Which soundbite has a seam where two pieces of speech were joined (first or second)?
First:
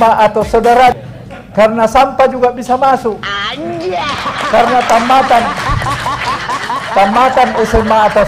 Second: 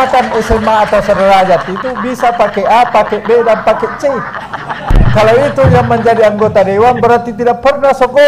first